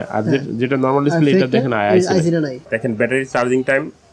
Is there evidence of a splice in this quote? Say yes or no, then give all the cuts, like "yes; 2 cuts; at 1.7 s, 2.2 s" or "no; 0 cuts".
yes; 1 cut; at 2.7 s